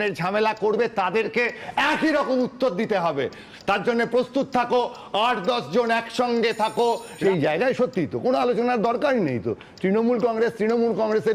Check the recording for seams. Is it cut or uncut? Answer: cut